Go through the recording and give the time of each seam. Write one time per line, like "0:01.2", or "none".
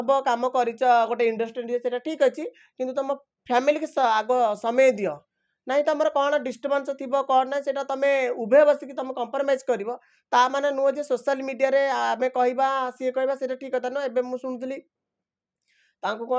none